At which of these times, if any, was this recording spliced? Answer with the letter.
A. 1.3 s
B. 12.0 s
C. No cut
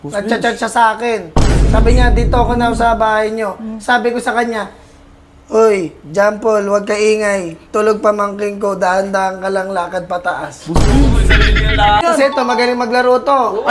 B